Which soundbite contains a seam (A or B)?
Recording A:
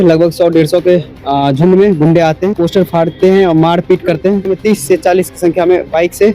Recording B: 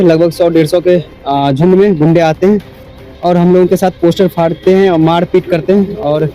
A